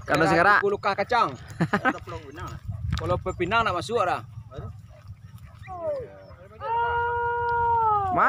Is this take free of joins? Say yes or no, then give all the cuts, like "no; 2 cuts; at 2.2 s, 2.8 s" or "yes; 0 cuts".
no; 1 cut; at 5.8 s